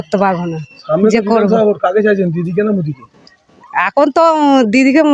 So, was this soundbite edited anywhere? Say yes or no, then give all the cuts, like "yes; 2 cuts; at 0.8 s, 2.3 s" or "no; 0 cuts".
no; 0 cuts